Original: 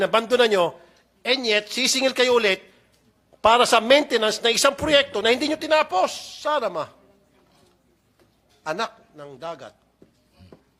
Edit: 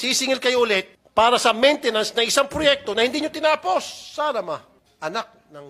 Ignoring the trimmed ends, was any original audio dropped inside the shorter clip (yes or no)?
yes